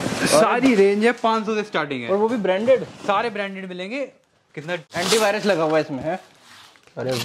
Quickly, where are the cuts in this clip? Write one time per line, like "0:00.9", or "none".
0:04.9